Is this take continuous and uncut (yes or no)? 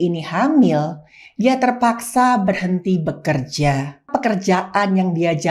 no